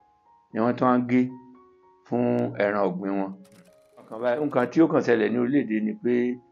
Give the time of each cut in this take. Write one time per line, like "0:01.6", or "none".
0:04.1